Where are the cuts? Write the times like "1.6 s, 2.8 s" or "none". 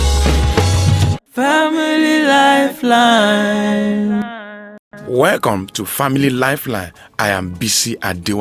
none